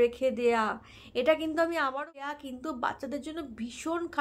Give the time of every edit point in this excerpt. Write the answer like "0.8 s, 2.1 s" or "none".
2.3 s